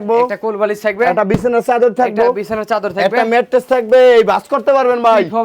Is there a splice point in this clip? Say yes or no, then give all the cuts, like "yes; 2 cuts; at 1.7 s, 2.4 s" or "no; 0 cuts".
no; 0 cuts